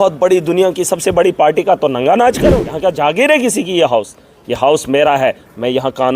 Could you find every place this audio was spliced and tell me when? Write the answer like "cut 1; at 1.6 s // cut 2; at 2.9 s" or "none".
cut 1; at 2.7 s